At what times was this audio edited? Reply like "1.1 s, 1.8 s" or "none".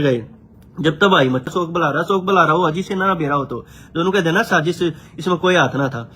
1.5 s